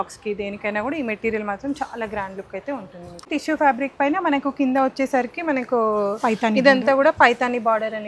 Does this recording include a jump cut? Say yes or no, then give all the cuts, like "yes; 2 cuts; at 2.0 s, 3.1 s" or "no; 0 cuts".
yes; 1 cut; at 3.2 s